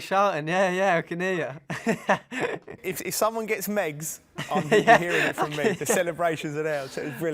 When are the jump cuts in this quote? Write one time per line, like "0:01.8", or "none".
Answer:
0:02.9

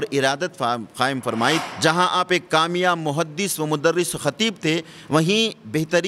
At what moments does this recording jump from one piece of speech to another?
0:01.7

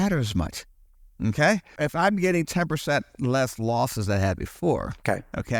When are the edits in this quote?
0:01.7

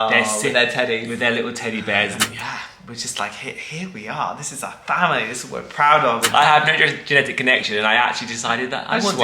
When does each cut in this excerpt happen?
0:02.2
0:06.3

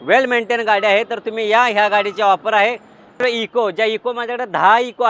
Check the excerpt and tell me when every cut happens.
0:03.2

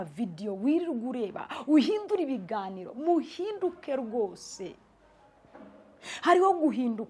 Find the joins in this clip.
none

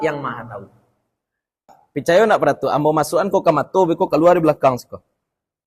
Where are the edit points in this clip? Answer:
0:01.8

